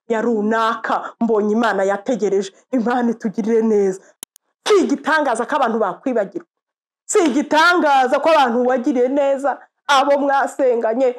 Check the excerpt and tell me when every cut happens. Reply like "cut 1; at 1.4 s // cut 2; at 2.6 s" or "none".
cut 1; at 4.1 s